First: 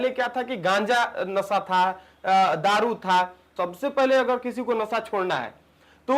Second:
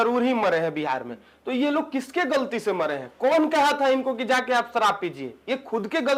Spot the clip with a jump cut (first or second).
first